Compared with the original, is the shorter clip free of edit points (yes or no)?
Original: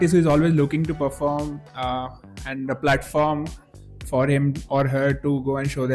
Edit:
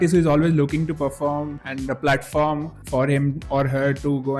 no